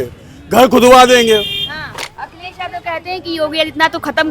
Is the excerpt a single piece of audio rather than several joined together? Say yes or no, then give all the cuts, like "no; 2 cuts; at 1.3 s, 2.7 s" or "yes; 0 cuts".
no; 1 cut; at 2.0 s